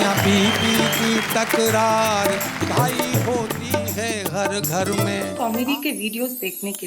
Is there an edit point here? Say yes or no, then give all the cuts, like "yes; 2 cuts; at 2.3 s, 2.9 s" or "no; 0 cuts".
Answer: yes; 1 cut; at 5.3 s